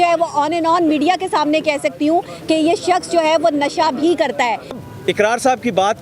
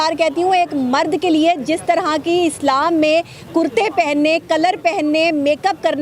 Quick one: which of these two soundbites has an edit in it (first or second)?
first